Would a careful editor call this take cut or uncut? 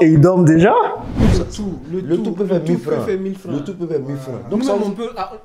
cut